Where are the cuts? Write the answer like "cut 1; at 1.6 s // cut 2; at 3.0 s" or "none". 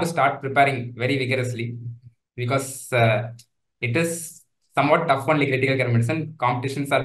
none